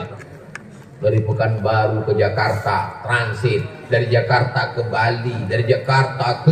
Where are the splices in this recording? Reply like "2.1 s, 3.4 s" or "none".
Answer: none